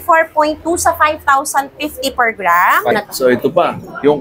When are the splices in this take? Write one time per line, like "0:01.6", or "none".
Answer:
0:02.9